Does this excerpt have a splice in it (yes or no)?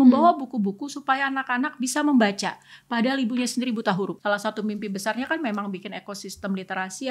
yes